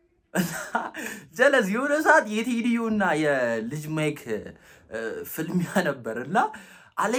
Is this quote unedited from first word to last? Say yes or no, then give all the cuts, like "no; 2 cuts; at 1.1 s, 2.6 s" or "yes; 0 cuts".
yes; 0 cuts